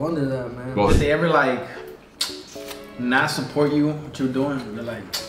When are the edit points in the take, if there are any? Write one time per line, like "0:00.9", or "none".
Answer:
0:00.9